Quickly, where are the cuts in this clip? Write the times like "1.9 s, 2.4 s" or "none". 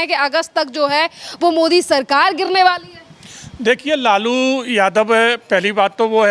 none